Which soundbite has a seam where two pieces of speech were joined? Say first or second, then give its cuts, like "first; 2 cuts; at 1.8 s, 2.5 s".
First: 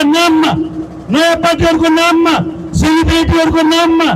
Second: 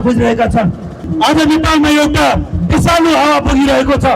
second; 1 cut; at 1.1 s